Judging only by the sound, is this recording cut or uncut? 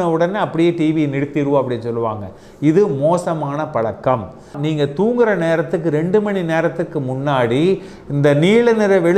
cut